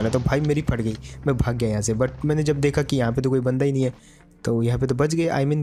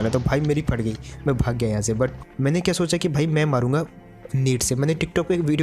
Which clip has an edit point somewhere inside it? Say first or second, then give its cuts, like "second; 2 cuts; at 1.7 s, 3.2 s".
second; 1 cut; at 2.2 s